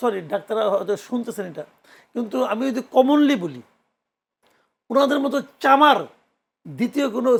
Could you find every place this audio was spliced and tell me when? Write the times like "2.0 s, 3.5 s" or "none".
none